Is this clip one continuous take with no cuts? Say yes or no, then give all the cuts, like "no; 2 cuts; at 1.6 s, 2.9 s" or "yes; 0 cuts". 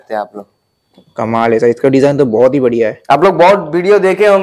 yes; 0 cuts